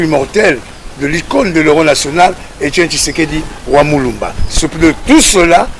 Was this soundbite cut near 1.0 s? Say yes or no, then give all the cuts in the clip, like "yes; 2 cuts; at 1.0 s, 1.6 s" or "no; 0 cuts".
no; 0 cuts